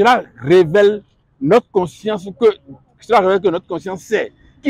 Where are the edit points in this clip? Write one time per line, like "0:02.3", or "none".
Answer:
none